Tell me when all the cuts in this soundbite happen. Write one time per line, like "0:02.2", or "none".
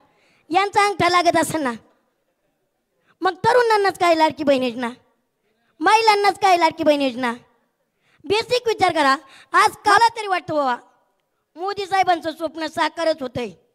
0:10.0